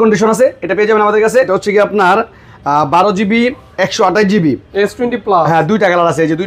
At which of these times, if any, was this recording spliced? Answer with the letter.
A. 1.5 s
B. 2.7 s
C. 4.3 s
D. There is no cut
A